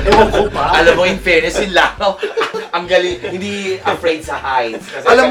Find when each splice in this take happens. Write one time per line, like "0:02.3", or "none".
none

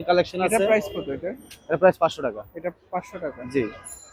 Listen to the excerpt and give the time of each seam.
none

